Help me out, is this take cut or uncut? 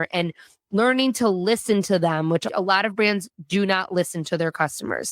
cut